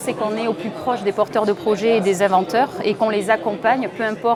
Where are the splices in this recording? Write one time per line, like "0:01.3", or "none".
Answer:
none